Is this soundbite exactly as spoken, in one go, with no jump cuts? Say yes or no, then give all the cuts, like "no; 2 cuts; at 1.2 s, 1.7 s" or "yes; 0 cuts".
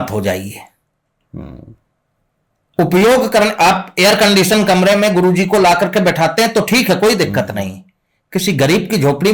yes; 0 cuts